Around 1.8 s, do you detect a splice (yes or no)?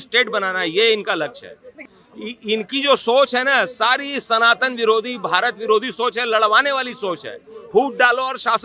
yes